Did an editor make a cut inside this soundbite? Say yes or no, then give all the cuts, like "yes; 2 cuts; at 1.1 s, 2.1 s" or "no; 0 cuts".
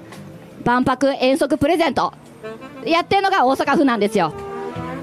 no; 0 cuts